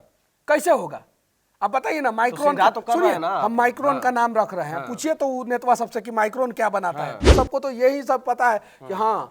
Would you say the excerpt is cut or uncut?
cut